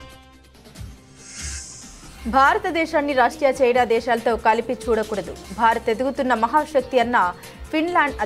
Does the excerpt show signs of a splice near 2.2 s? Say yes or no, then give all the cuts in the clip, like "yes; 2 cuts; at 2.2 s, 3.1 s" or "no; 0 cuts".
yes; 1 cut; at 2.2 s